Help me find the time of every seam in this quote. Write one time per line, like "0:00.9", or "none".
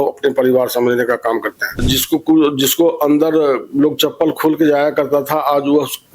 0:01.8